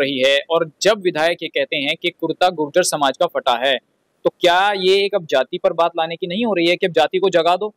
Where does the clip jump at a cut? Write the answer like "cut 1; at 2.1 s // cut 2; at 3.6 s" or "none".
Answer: none